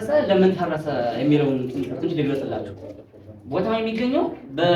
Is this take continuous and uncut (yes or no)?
yes